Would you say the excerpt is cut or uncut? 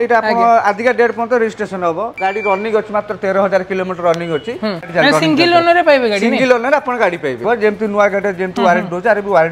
cut